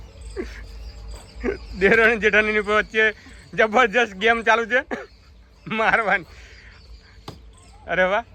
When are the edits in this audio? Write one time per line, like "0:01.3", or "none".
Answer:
none